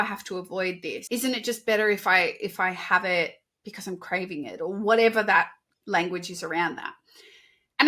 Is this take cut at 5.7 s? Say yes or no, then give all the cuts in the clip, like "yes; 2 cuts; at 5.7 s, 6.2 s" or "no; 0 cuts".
yes; 2 cuts; at 0.9 s, 5.7 s